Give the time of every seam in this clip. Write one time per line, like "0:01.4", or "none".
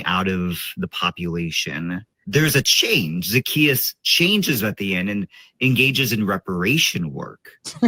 0:02.1